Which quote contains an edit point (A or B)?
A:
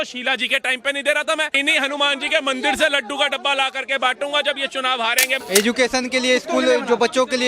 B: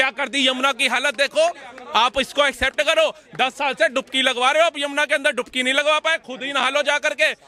A